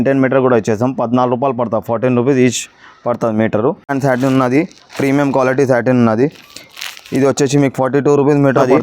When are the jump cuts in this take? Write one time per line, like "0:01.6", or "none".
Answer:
0:03.9